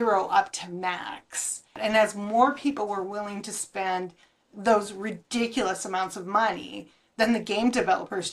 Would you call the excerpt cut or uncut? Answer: cut